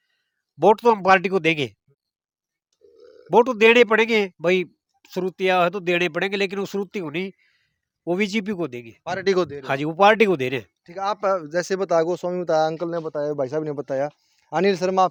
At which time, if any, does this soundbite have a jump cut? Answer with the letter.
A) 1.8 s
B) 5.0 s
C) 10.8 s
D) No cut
D